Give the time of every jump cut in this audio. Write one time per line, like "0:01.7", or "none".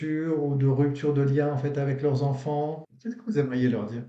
0:02.9